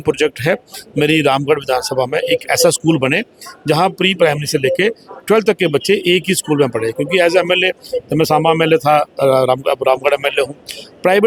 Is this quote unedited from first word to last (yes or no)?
yes